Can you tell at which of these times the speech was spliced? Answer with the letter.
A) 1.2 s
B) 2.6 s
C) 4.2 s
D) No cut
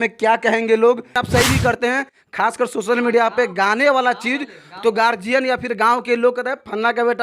A